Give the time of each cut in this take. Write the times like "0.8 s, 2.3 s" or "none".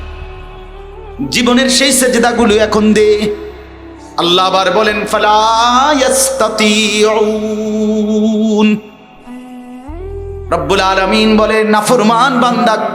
9.0 s, 10.5 s